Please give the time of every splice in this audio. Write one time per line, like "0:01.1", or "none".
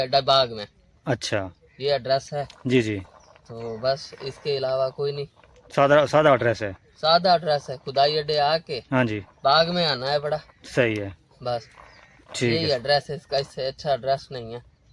none